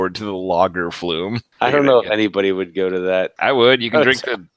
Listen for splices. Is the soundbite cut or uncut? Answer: cut